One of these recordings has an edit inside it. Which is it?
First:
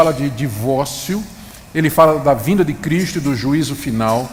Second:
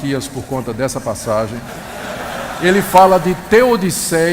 second; 1 cut; at 2.9 s

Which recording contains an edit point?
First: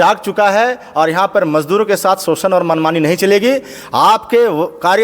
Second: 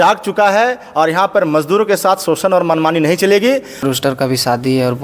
second; 1 cut; at 3.8 s

